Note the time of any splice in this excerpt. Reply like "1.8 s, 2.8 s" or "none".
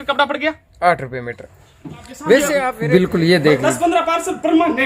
2.7 s